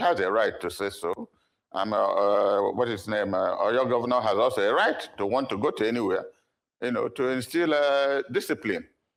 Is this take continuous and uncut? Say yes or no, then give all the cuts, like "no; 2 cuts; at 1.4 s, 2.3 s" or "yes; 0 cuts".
yes; 0 cuts